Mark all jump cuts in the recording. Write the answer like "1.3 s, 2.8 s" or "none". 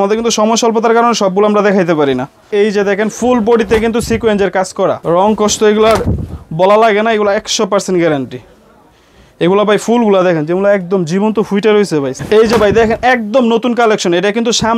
2.4 s, 5.0 s, 12.1 s